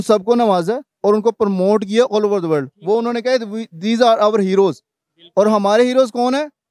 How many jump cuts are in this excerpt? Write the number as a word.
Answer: zero